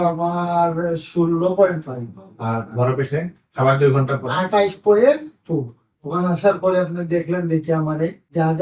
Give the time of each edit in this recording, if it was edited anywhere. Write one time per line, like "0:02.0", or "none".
0:05.8